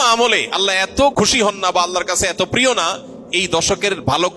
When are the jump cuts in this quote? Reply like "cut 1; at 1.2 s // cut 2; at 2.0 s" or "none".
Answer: cut 1; at 1.1 s